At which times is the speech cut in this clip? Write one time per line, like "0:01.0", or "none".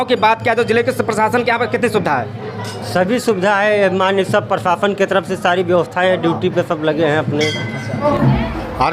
0:08.0